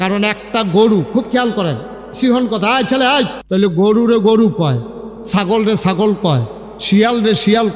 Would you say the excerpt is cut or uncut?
cut